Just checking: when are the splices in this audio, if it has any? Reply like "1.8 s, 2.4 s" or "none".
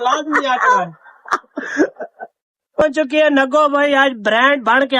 2.8 s